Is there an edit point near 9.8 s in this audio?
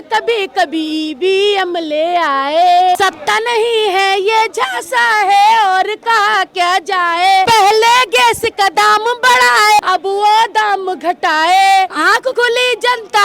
yes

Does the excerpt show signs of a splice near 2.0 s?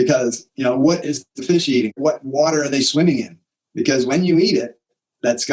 yes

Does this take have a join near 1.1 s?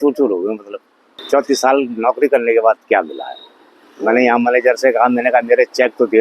yes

